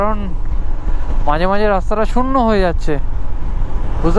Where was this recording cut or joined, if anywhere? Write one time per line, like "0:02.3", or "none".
none